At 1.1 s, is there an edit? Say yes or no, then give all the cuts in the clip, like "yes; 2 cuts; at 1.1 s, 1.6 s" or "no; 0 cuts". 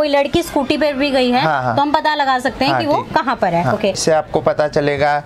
no; 1 cut; at 4.0 s